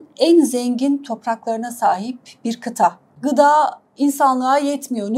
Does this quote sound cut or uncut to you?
cut